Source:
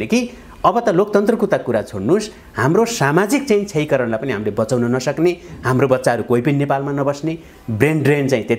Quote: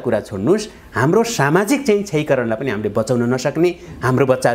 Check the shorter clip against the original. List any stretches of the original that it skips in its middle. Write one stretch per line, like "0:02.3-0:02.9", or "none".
none